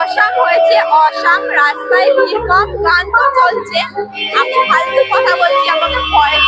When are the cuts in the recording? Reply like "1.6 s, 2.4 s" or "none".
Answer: none